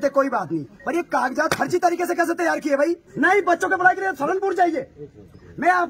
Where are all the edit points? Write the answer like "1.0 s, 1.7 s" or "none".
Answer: 3.1 s